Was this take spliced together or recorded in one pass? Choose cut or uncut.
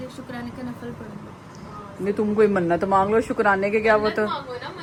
uncut